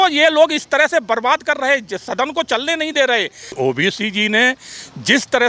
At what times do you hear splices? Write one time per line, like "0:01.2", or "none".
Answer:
0:03.5